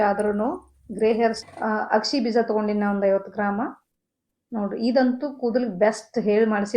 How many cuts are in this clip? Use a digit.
1